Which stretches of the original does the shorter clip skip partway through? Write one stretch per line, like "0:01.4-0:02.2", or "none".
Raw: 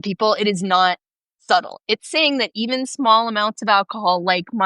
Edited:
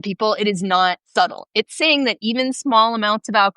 0:01.0-0:01.4